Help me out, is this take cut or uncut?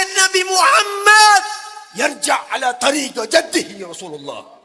uncut